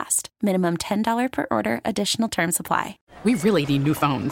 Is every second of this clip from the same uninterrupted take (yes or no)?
no